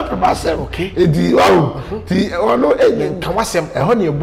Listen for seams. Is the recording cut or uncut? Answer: uncut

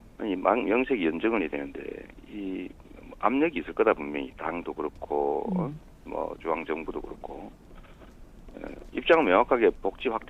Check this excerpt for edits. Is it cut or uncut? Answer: cut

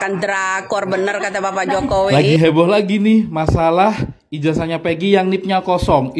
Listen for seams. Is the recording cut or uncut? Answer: cut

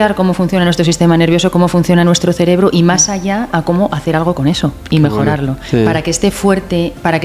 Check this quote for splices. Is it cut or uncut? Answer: cut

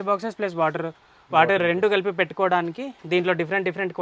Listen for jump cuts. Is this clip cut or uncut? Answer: uncut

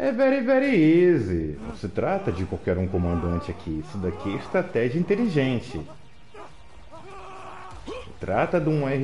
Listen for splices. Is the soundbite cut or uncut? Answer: cut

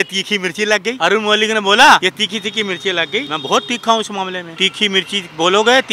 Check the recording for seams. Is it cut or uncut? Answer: cut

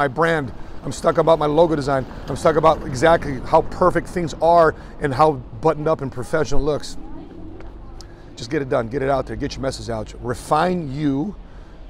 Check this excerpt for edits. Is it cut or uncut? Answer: uncut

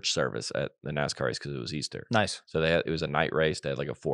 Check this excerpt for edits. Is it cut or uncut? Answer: uncut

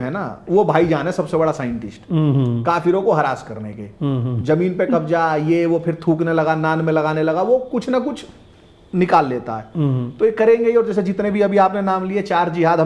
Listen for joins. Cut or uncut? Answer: uncut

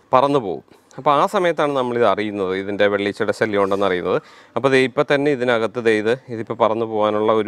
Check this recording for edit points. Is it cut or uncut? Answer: uncut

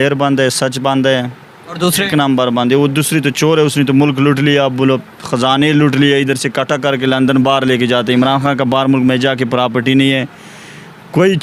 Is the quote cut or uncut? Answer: uncut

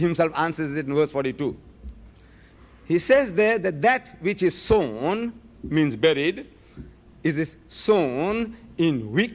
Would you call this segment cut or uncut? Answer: cut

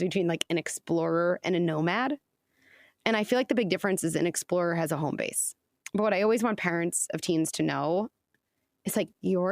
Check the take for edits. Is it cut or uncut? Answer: cut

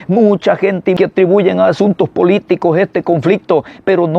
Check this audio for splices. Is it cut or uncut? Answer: cut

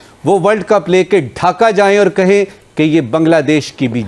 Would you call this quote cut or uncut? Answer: uncut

